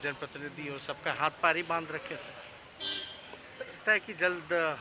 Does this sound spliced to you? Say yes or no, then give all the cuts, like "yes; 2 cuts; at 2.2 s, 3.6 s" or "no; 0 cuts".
yes; 1 cut; at 3.8 s